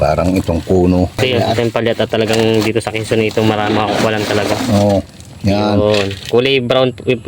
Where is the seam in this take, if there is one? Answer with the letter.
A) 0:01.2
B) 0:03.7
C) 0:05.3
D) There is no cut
A